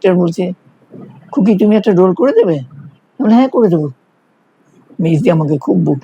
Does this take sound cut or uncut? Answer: uncut